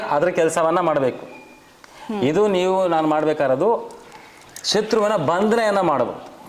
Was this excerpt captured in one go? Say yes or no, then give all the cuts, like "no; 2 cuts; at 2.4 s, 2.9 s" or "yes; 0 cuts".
yes; 0 cuts